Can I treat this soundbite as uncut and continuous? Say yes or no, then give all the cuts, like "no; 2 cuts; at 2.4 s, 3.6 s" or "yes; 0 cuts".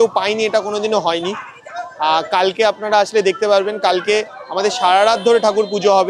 yes; 0 cuts